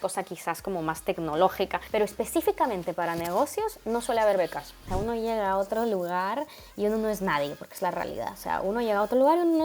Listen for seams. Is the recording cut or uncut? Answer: cut